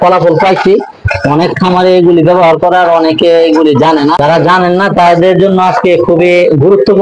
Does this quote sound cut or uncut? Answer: uncut